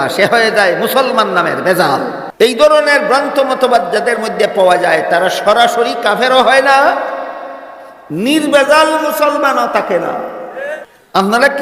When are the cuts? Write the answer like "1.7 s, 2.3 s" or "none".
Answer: 2.2 s, 10.8 s